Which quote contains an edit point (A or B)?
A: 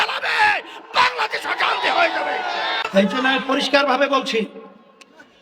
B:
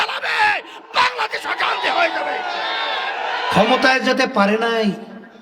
B